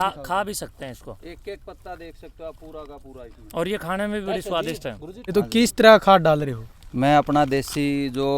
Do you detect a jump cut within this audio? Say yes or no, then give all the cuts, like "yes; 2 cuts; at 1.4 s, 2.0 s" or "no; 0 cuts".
yes; 1 cut; at 5.3 s